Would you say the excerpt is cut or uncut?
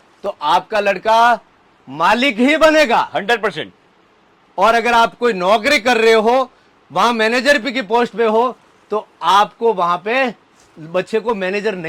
uncut